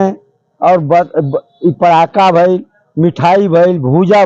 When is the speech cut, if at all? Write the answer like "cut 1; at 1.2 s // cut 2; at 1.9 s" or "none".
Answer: none